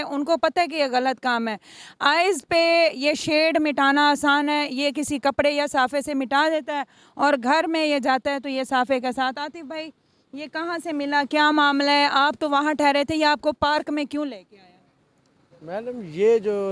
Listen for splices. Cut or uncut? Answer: uncut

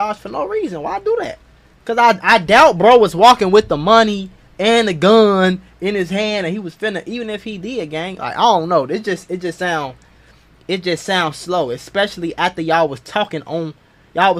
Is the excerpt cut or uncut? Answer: uncut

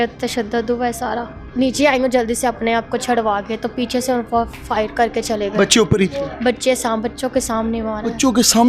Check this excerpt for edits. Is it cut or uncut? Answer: cut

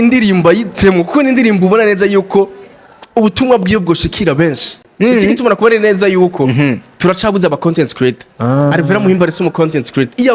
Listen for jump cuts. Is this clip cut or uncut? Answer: uncut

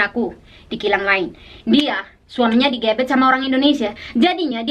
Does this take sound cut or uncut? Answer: uncut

